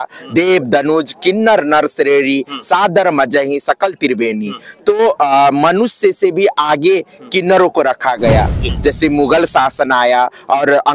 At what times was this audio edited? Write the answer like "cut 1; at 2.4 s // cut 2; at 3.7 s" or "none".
cut 1; at 8.6 s